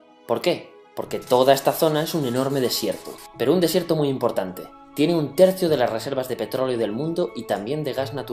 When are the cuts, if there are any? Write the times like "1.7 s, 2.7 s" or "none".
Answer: 5.6 s